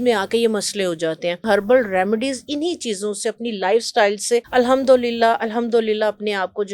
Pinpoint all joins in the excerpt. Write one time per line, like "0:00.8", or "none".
0:01.4
0:04.5